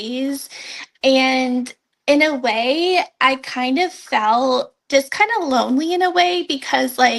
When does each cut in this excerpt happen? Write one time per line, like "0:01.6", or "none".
0:04.8